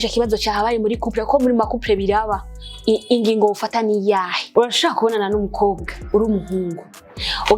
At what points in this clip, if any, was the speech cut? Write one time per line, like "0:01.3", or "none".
0:04.4